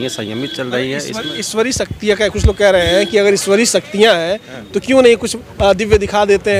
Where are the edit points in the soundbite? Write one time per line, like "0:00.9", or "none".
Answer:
none